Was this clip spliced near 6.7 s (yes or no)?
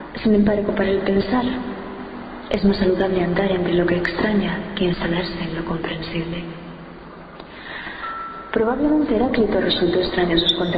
yes